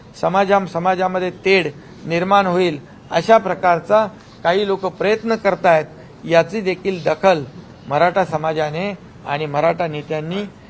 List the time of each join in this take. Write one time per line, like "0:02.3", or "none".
none